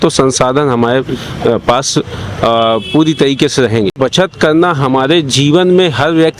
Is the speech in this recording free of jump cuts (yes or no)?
no